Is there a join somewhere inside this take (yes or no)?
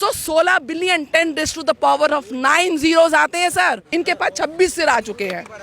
yes